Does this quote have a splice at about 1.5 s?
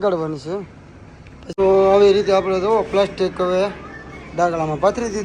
yes; 1 cut; at 1.5 s

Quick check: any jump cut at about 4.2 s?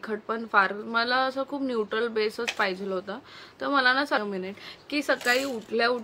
yes; 1 cut; at 4.2 s

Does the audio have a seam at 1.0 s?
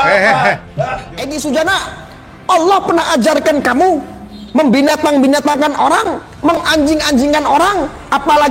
yes; 1 cut; at 1.0 s

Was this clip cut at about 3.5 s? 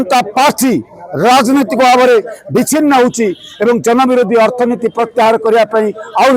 no; 0 cuts

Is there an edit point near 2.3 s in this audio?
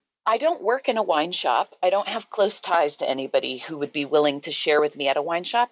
no; 0 cuts

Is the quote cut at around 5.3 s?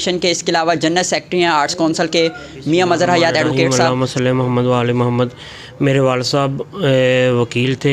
no; 1 cut; at 3.7 s

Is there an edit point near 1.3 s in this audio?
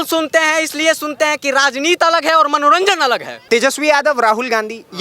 no; 1 cut; at 3.3 s

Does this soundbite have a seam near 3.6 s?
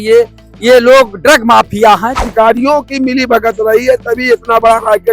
no; 1 cut; at 2.3 s

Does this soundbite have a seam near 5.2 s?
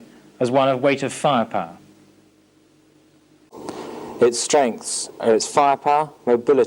no; 1 cut; at 3.5 s

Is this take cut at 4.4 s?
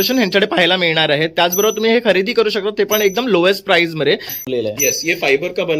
yes; 1 cut; at 4.4 s

